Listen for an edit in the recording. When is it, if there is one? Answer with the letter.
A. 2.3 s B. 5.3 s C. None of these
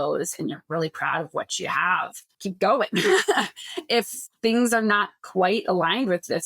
A